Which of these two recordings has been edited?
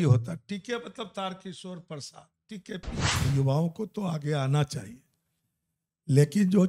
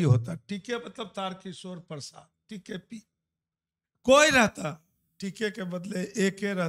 first; 1 cut; at 3.1 s

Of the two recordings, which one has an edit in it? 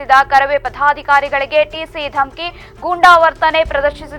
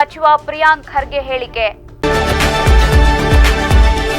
second; 1 cut; at 1.9 s

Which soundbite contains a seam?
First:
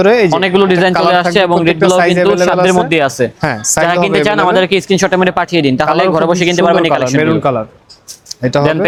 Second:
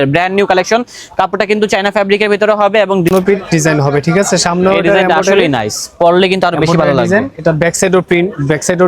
second; 1 cut; at 3.1 s

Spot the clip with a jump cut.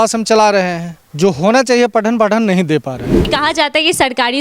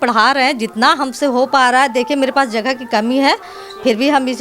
first; 2 cuts; at 1.0 s, 3.3 s

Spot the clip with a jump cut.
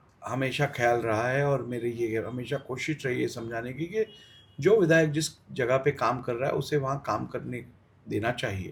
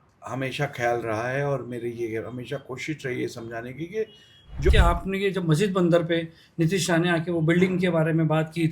second; 1 cut; at 4.7 s

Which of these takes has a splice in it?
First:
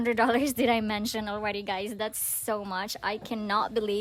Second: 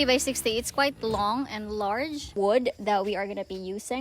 second; 1 cut; at 2.3 s

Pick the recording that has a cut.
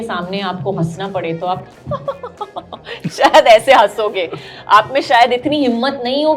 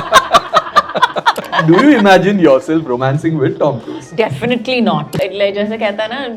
second; 2 cuts; at 1.5 s, 5.1 s

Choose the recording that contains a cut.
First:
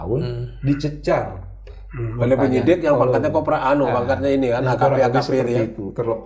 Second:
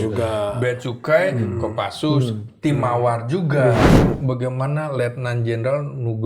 second; 1 cut; at 4.1 s

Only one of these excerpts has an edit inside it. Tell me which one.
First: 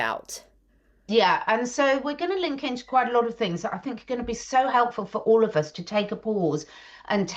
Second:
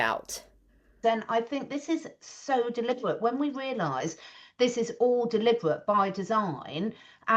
second; 1 cut; at 0.9 s

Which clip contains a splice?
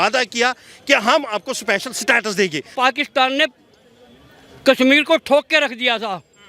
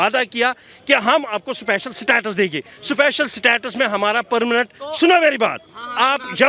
first; 1 cut; at 2.7 s

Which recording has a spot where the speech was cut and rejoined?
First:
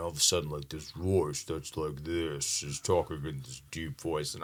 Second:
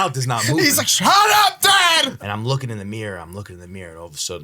second; 1 cut; at 2.1 s

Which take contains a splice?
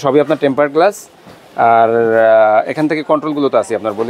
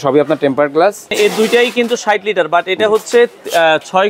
second; 1 cut; at 1.1 s

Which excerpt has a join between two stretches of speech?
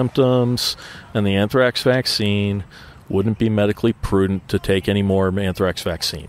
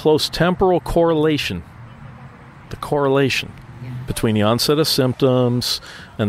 second; 1 cut; at 4.1 s

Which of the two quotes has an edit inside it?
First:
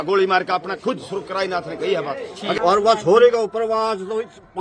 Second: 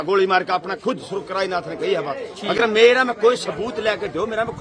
first; 1 cut; at 2.6 s

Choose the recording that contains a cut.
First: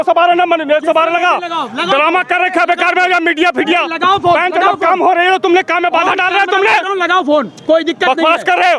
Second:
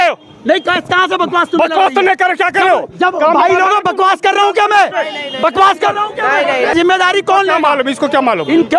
second; 1 cut; at 6.7 s

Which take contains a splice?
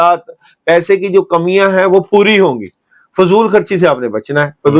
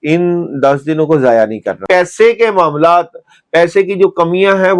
second; 1 cut; at 1.8 s

